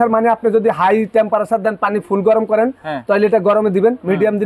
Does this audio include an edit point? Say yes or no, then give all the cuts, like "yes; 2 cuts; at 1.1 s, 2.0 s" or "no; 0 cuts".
no; 0 cuts